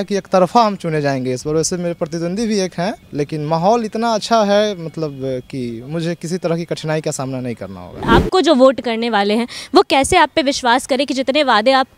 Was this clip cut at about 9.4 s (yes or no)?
no